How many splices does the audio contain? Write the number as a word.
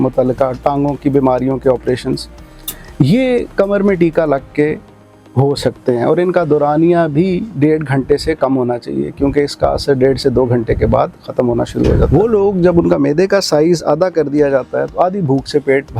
one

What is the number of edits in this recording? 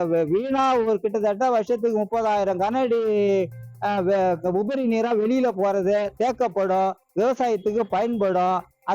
zero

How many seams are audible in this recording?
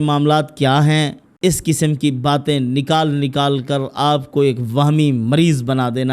one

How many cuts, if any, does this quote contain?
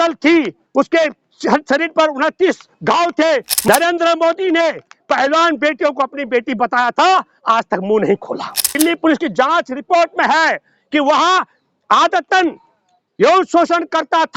two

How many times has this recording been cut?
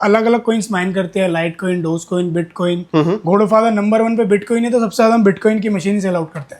zero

